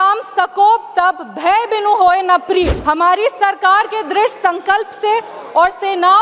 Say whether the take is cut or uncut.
cut